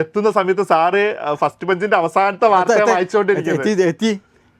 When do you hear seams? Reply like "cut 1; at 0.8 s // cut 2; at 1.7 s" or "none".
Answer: none